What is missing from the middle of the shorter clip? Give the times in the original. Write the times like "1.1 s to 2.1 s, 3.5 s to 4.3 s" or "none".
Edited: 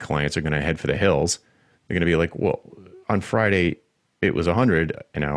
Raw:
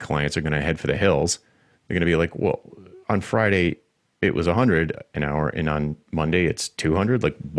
none